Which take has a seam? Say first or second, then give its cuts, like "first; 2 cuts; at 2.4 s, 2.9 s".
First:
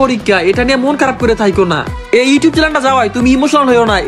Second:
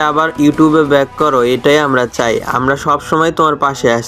first; 1 cut; at 1.9 s